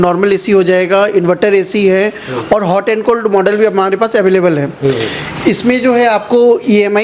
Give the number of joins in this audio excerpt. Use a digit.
0